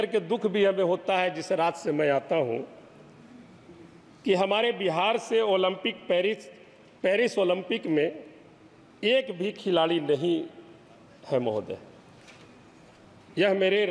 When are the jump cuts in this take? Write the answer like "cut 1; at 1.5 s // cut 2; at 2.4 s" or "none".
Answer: none